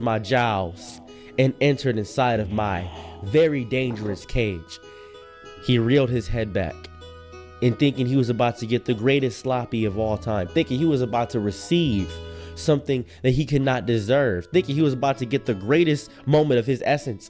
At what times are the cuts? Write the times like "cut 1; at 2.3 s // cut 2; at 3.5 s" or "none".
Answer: none